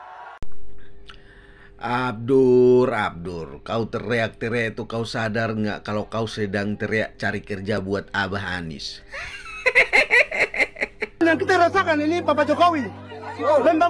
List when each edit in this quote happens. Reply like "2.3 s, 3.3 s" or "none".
11.2 s